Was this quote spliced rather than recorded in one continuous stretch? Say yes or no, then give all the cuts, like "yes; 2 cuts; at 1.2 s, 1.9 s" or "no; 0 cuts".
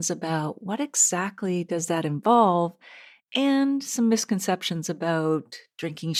no; 0 cuts